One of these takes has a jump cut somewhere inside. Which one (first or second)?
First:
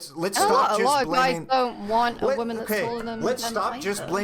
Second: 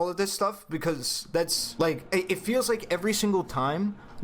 second